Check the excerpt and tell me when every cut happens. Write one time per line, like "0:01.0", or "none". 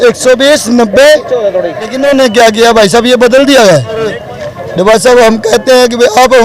0:01.9
0:04.3

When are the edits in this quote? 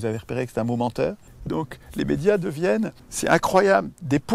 0:01.3
0:03.0

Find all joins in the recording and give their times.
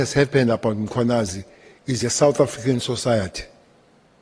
none

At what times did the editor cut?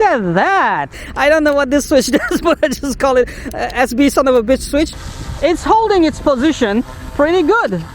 0:01.0
0:04.9

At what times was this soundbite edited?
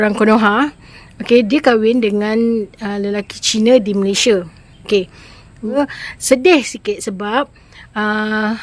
0:05.8

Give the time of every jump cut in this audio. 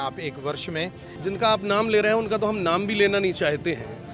0:01.0

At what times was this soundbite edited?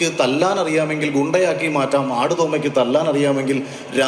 none

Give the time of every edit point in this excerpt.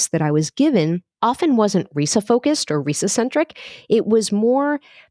0:01.1

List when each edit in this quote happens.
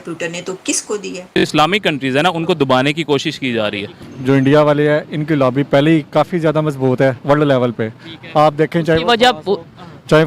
0:01.4

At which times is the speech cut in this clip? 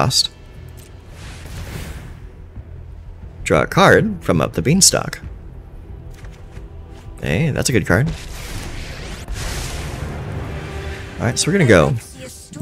none

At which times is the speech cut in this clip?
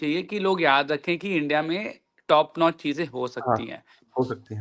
none

